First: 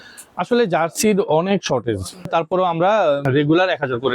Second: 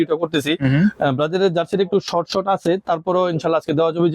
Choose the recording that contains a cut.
first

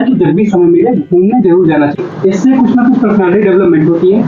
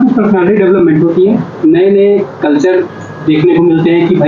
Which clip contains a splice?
first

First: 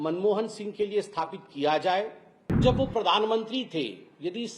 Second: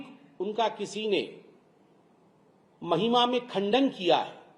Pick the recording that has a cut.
first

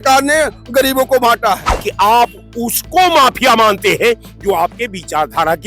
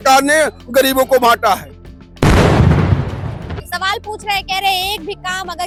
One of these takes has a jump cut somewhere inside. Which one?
first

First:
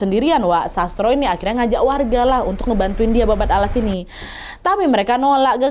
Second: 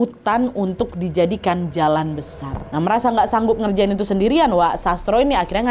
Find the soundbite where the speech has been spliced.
second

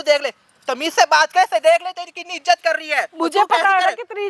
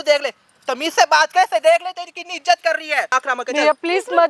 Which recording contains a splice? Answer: second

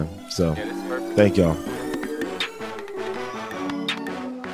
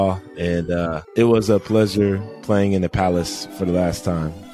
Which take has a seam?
first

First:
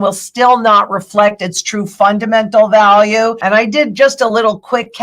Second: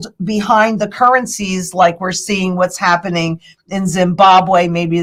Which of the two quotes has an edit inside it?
first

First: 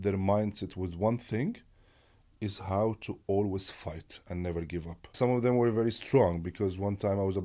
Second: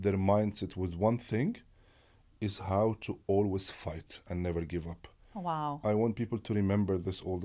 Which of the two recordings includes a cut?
first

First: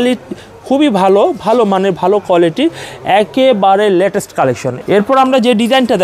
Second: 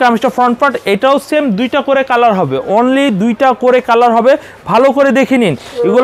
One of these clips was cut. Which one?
first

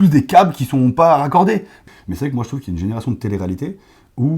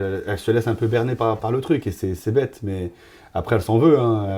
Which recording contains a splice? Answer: first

